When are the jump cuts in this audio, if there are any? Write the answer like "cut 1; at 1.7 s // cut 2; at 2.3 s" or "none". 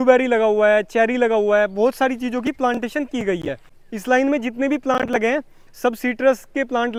none